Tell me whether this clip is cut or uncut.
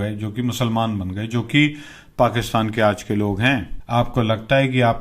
cut